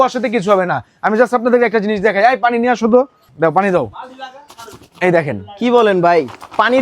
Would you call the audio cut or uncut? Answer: cut